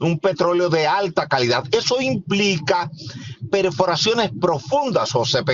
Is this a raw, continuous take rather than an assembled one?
yes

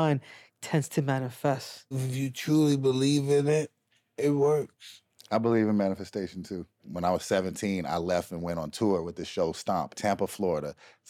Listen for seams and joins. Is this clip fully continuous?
no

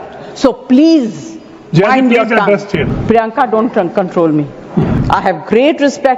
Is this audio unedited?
no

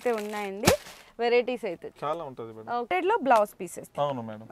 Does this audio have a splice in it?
yes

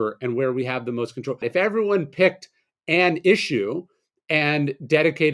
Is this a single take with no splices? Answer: no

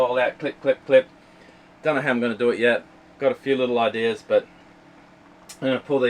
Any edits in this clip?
no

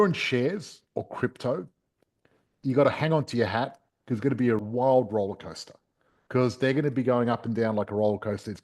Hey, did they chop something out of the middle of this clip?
yes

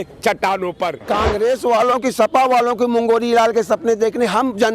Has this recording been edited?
yes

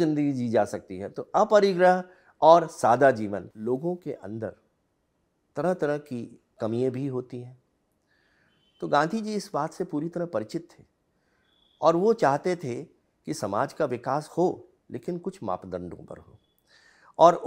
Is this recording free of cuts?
no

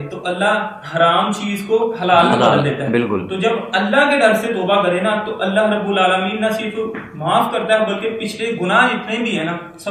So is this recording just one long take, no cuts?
yes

